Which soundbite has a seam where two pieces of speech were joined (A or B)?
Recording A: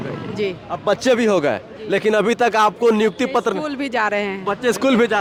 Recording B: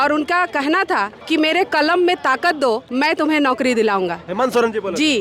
B